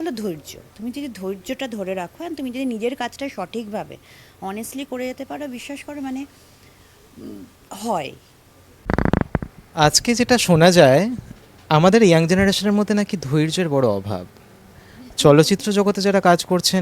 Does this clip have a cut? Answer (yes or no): yes